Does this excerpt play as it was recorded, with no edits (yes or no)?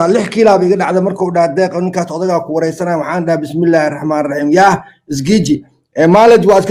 yes